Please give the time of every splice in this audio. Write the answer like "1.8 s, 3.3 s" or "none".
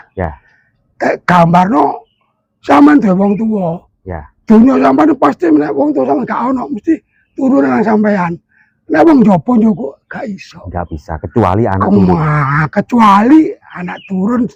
none